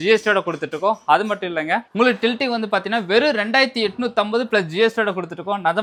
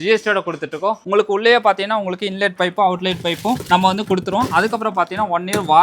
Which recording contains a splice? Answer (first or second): second